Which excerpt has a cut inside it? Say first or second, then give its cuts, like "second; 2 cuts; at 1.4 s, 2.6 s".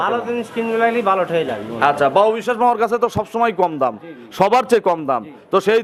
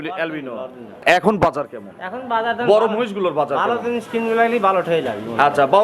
second; 1 cut; at 1.0 s